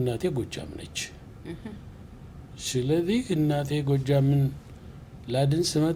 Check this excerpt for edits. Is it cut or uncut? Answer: uncut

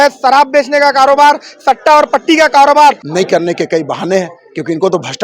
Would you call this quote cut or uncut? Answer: cut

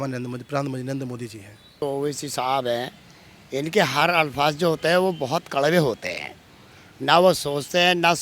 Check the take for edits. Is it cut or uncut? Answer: cut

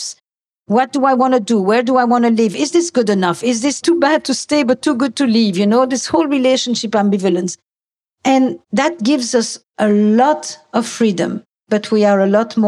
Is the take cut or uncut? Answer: cut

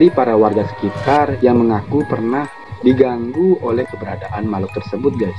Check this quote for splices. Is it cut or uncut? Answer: uncut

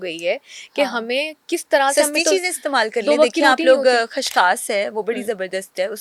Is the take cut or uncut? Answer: uncut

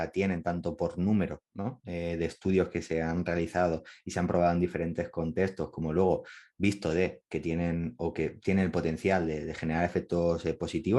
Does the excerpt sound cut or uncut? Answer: uncut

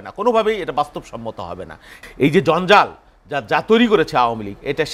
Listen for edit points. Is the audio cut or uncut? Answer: cut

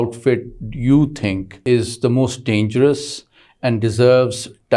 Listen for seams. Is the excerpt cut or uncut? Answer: cut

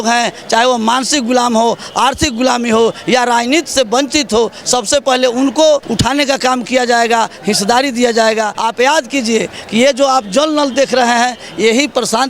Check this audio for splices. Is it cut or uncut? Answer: cut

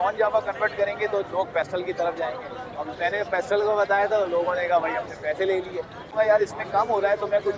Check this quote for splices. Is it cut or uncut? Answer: cut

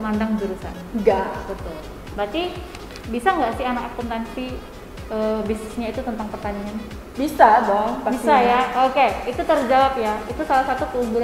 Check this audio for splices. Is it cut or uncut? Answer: uncut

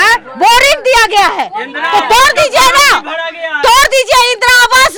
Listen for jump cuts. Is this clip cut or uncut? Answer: uncut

